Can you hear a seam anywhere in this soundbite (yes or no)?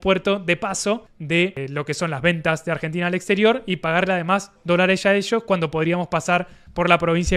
no